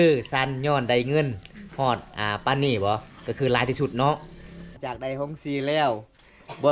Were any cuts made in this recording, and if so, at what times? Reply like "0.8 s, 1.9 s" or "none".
4.7 s